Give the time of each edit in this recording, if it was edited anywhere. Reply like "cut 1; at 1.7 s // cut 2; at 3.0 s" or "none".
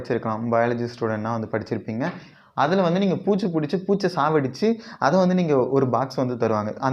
cut 1; at 2.3 s